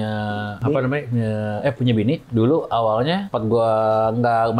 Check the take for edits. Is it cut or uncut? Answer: uncut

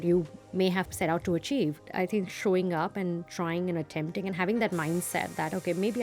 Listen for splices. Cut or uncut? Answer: cut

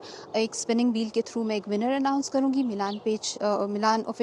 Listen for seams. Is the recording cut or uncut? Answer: uncut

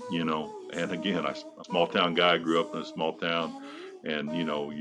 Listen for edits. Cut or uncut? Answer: cut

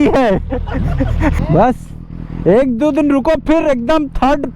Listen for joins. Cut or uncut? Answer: cut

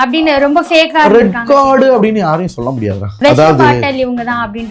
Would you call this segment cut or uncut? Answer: cut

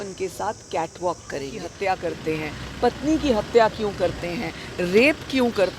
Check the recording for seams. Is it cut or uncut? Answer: cut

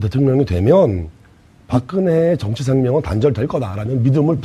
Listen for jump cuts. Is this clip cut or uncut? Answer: cut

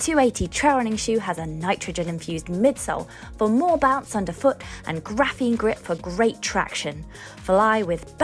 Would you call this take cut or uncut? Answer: uncut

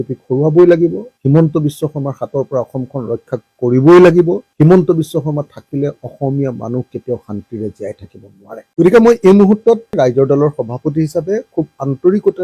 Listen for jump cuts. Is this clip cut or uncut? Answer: cut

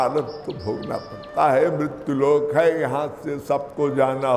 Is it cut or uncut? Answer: uncut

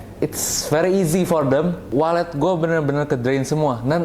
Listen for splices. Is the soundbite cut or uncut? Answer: cut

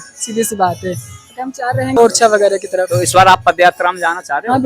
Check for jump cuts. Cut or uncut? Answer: cut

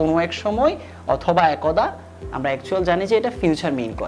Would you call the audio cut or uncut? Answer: uncut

